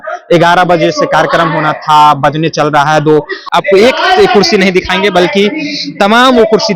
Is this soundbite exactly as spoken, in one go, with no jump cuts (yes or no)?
no